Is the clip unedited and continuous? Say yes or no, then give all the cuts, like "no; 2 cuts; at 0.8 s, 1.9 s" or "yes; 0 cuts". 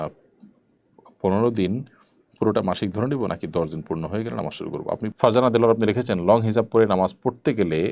no; 1 cut; at 5.1 s